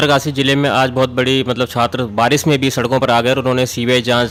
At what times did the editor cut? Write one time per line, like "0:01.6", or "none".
none